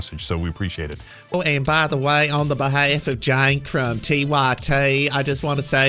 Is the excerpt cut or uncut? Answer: cut